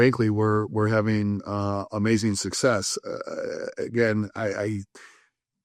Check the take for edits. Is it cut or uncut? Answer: uncut